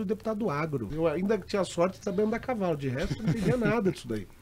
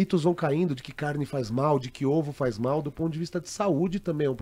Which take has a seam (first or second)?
first